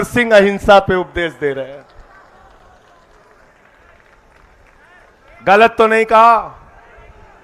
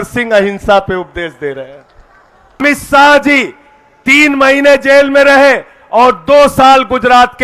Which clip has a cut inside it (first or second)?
second